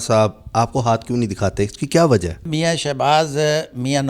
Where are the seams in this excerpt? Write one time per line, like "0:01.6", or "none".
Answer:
0:02.5